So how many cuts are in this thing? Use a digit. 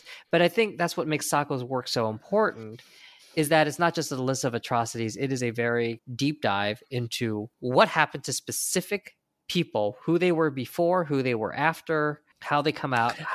2